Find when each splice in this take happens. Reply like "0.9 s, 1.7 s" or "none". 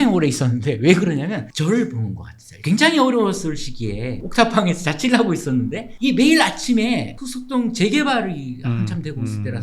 none